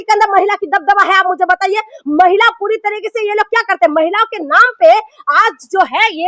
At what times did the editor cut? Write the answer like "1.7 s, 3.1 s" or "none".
none